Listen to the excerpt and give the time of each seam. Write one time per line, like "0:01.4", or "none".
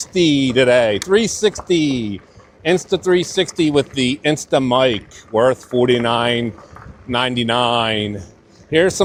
none

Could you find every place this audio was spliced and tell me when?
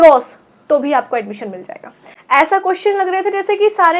0:02.1

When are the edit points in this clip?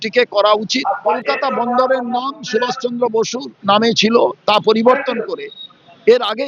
0:01.2

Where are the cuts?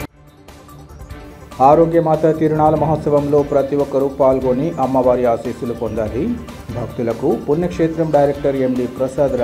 0:01.0

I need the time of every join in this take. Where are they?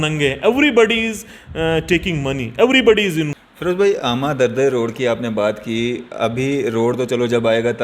0:03.3

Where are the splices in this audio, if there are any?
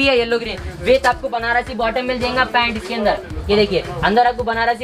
none

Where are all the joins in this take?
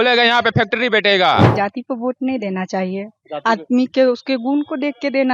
0:01.5

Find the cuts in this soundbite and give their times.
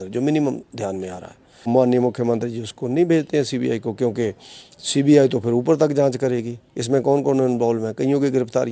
0:01.7

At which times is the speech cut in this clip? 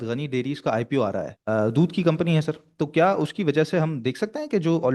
0:01.3

